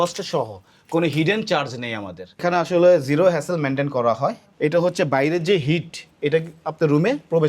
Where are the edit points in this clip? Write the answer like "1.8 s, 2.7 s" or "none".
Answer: 2.4 s, 4.5 s